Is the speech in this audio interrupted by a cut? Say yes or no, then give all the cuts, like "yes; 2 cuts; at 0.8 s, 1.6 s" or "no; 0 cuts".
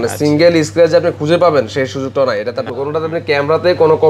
yes; 1 cut; at 2.7 s